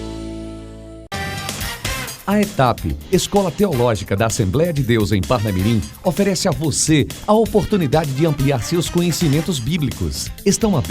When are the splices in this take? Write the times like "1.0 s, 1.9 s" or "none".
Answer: 1.0 s

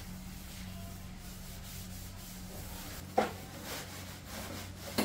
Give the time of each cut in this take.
none

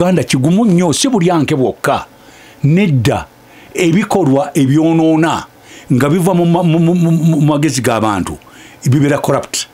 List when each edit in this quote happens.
none

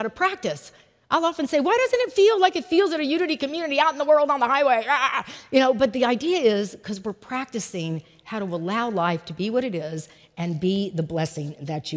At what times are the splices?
none

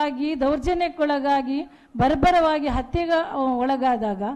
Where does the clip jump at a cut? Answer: none

